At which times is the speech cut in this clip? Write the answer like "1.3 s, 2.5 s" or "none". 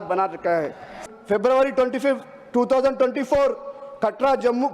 1.0 s